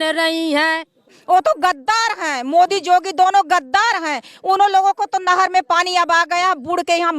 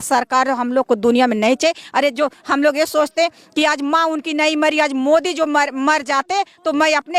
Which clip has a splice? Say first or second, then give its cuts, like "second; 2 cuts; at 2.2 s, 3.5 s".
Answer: first; 1 cut; at 1.1 s